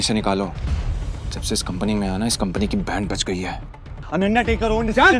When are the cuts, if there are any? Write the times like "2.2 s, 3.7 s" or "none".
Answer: none